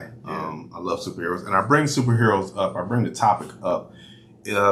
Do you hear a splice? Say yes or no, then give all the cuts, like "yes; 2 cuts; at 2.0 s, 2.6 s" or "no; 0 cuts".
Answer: no; 0 cuts